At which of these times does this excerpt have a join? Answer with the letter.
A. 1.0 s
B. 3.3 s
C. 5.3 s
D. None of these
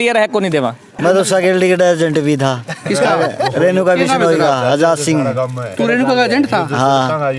A